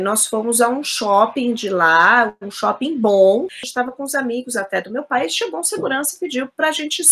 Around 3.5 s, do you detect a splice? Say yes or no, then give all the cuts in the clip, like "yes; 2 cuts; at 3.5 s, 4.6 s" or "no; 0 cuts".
yes; 1 cut; at 3.5 s